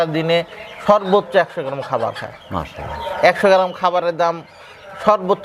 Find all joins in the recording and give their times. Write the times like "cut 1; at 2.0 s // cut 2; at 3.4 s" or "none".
none